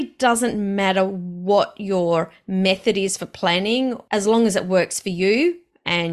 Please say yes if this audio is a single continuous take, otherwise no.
no